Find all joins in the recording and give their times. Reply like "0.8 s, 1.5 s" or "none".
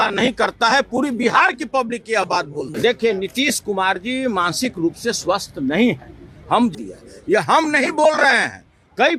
2.7 s, 6.7 s